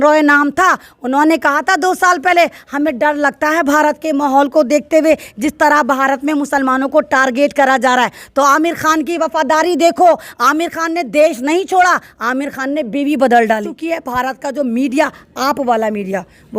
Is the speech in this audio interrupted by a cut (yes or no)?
yes